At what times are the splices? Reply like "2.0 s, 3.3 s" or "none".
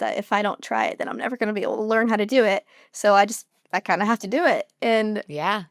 none

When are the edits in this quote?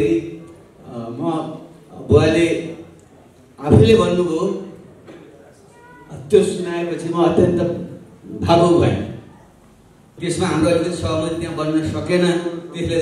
10.1 s

